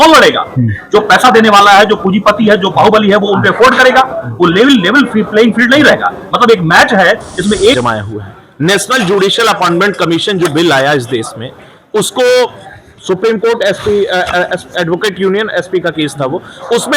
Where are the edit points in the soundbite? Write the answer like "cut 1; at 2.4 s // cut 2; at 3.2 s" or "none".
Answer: cut 1; at 7.8 s